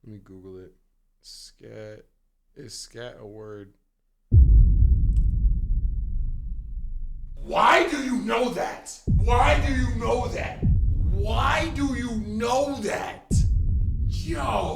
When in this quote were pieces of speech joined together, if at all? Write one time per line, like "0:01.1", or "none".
0:07.4